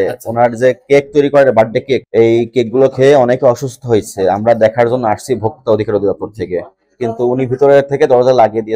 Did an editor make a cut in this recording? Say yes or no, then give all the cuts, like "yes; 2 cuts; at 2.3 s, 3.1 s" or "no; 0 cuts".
no; 0 cuts